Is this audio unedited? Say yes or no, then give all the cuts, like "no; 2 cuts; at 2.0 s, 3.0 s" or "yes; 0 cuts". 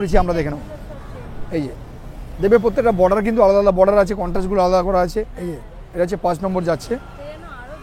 no; 1 cut; at 2.2 s